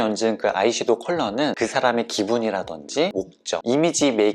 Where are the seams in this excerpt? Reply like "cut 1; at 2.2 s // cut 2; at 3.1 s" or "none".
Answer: none